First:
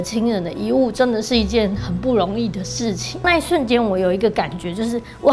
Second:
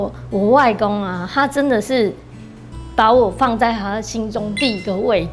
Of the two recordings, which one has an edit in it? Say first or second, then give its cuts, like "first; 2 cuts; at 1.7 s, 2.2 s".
first; 1 cut; at 3.2 s